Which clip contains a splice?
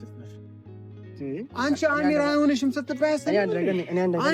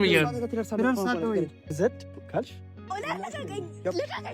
second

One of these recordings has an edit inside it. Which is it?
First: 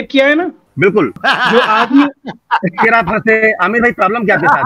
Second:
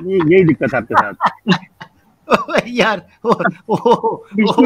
first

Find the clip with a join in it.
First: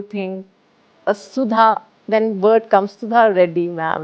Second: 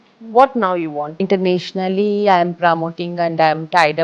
second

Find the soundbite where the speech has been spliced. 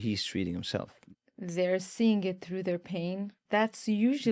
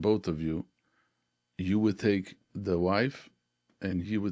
first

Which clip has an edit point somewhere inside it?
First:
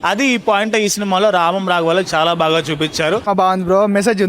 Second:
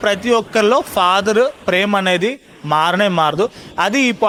first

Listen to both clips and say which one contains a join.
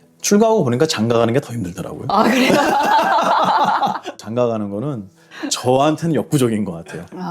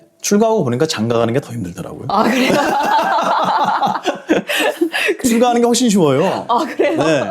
first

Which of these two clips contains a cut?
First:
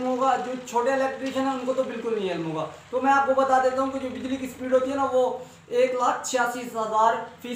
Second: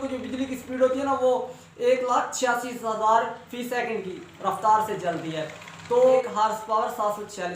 second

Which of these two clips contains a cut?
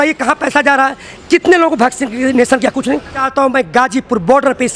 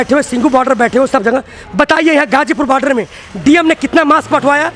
first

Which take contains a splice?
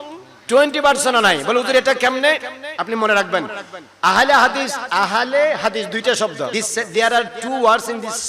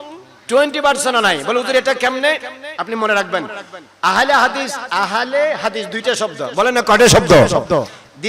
first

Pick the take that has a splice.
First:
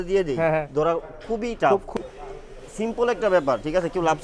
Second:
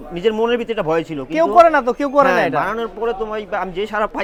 first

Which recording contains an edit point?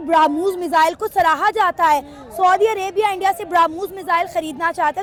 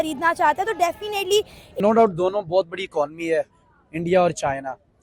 second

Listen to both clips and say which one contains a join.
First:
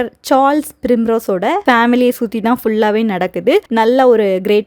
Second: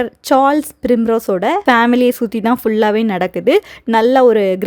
first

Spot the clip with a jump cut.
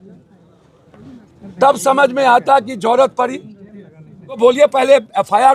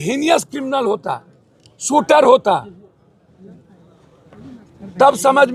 first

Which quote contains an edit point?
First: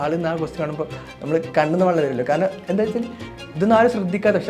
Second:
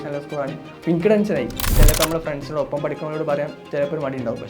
second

